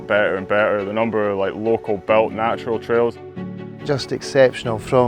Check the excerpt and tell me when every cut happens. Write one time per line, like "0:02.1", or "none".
0:03.2